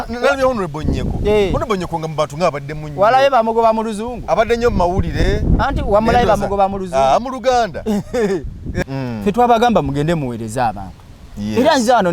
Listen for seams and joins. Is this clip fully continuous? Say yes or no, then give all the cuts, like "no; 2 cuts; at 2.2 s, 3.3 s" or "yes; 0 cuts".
no; 1 cut; at 8.9 s